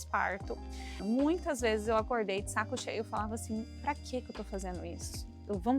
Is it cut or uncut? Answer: cut